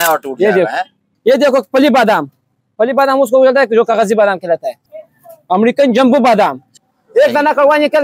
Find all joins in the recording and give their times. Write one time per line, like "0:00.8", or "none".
0:01.0
0:04.8
0:06.8